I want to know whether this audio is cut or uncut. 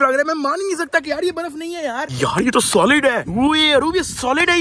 cut